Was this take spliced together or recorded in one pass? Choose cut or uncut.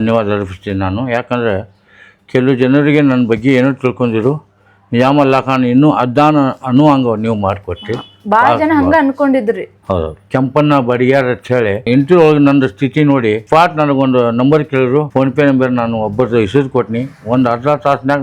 cut